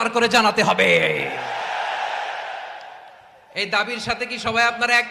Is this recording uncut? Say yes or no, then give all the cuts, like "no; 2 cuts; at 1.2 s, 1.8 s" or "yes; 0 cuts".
yes; 0 cuts